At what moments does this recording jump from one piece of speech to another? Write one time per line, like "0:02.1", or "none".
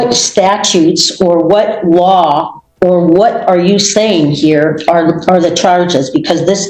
none